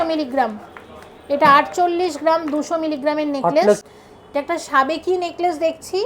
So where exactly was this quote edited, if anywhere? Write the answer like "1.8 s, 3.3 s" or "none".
3.8 s